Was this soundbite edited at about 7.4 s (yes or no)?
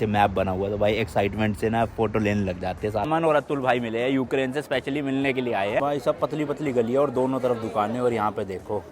no